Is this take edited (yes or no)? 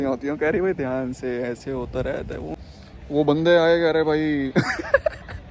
yes